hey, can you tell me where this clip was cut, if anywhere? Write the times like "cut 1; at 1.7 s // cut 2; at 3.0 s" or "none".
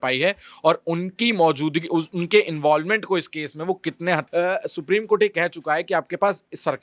cut 1; at 4.3 s